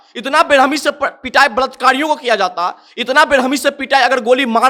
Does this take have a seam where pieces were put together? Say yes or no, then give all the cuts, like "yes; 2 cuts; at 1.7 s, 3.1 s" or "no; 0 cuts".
no; 0 cuts